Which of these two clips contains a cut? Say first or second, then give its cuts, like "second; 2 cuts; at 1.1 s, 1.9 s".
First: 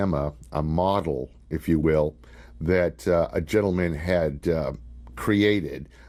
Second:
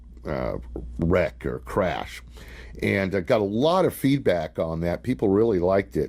second; 1 cut; at 5.2 s